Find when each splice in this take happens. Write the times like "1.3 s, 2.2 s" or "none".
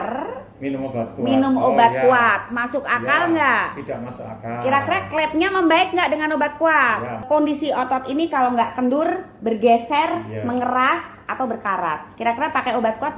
7.2 s